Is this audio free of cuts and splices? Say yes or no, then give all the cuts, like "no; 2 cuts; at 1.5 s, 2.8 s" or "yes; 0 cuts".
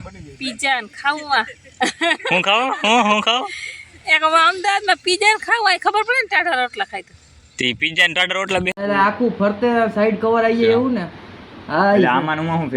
no; 1 cut; at 8.8 s